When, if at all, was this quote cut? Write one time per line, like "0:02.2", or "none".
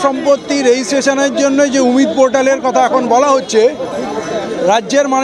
none

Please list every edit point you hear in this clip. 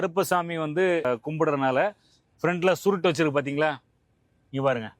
0:01.0

